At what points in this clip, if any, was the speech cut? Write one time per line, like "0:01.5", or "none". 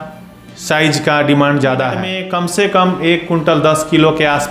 0:02.2